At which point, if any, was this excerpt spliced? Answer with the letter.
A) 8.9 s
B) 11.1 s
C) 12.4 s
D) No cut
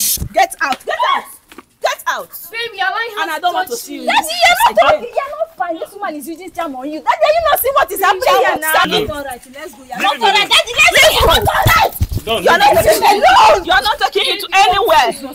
A